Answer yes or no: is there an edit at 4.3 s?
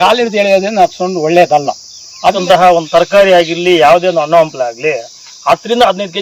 no